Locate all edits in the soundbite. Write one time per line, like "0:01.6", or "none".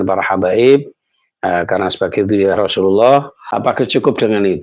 0:03.4